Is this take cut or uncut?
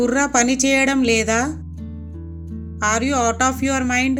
uncut